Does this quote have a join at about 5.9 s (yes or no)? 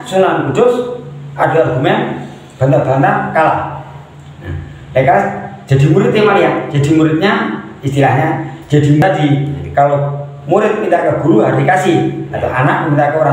no